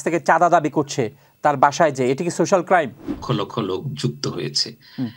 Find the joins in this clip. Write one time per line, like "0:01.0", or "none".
0:03.1

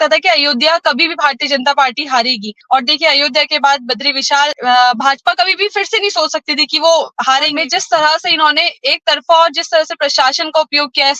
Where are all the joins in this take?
0:02.5
0:04.6
0:07.5

